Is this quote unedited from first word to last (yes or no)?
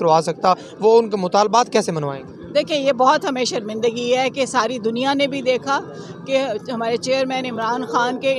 yes